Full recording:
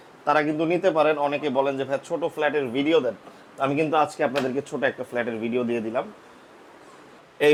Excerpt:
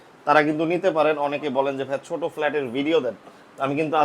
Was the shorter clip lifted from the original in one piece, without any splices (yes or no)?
yes